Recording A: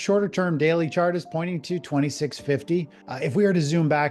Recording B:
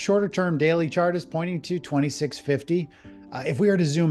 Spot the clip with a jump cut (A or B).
A